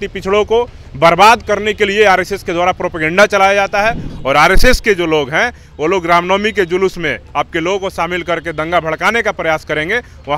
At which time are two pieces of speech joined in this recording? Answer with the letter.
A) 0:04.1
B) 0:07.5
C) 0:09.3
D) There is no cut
A